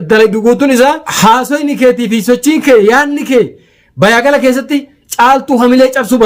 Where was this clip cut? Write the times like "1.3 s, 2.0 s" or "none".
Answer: 1.1 s